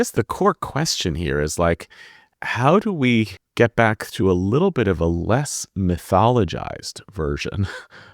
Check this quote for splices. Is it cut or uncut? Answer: cut